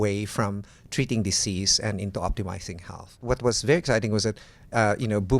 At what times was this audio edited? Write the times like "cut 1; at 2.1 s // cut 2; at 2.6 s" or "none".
cut 1; at 3.2 s